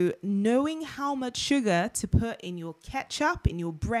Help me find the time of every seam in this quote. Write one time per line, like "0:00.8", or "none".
none